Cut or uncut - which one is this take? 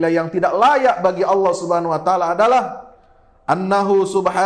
uncut